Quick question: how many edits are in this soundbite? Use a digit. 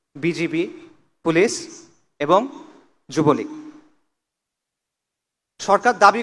0